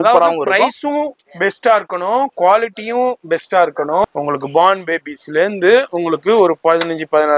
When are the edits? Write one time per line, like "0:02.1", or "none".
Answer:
0:04.0